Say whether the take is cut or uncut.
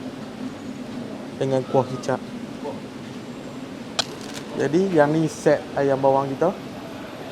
cut